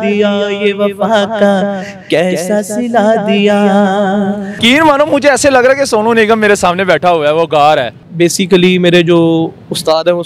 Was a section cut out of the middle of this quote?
yes; 2 cuts; at 4.5 s, 8.0 s

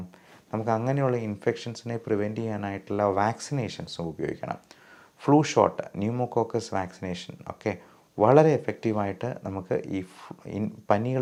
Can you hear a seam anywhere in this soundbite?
no; 0 cuts

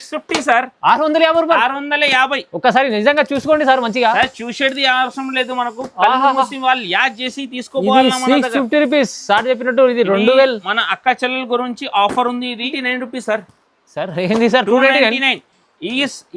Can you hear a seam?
yes; 1 cut; at 12.7 s

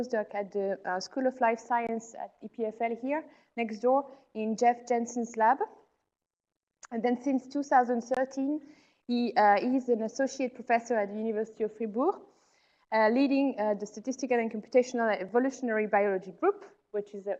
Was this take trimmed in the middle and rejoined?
no; 0 cuts

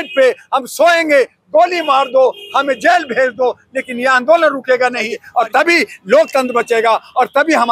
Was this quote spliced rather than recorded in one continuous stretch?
yes; 1 cut; at 5.2 s

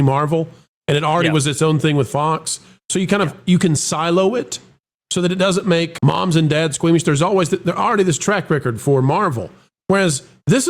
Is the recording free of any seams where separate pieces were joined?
no; 1 cut; at 5.9 s

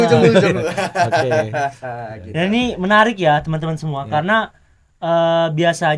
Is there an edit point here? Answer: no; 0 cuts

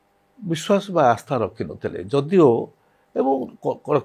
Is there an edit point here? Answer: no; 0 cuts

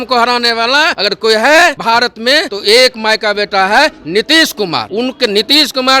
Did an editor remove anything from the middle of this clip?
yes; 3 cuts; at 1.0 s, 2.2 s, 4.9 s

